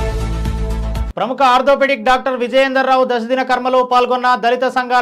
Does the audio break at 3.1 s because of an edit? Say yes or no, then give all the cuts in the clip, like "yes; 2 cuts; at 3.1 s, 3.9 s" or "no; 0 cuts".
no; 1 cut; at 1.1 s